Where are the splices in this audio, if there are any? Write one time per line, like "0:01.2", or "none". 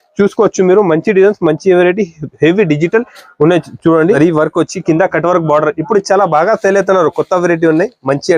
0:04.2